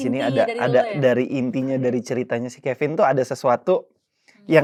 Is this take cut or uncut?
uncut